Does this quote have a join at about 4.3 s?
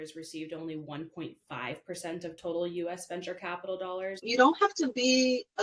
yes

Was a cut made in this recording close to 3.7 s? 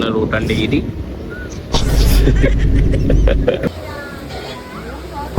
yes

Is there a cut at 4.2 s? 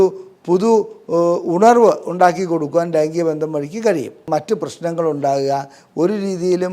yes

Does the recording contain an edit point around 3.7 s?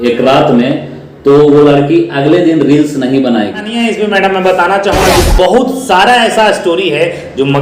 yes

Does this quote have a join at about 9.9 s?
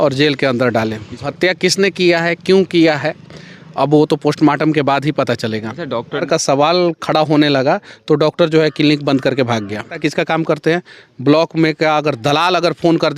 yes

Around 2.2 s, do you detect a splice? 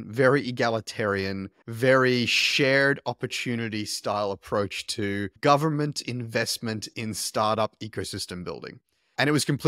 no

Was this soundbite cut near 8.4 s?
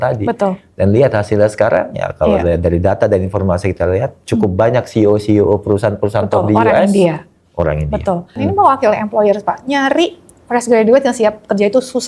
yes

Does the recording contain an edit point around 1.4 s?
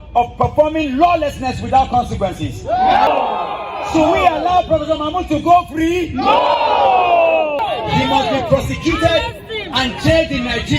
no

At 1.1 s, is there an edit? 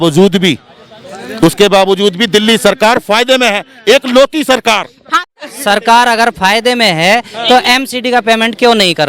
no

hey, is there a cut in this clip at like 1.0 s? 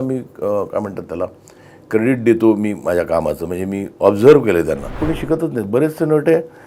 no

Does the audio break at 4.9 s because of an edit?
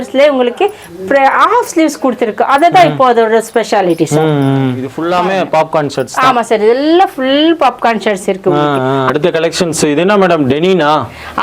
yes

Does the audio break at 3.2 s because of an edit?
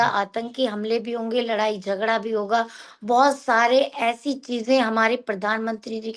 no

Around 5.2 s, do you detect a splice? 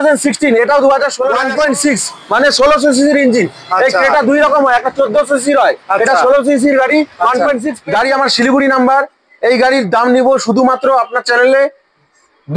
no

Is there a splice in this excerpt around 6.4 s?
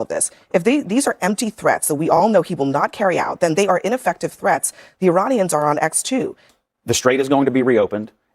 yes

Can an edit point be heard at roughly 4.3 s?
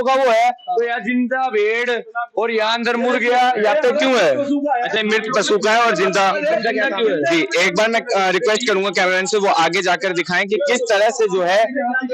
no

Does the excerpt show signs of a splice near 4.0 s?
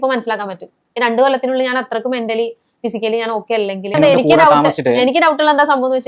yes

